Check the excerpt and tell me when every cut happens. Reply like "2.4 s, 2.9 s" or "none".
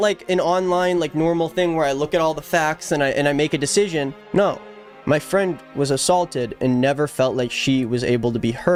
none